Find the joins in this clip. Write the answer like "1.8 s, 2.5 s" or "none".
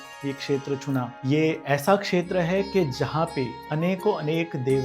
1.1 s